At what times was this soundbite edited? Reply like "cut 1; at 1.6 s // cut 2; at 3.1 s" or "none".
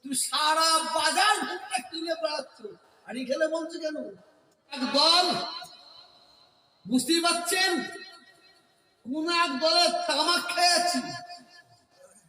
cut 1; at 4.8 s